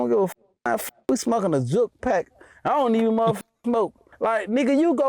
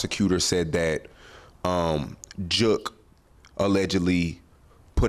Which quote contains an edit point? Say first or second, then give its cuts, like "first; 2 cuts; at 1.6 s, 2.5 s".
first; 1 cut; at 4.0 s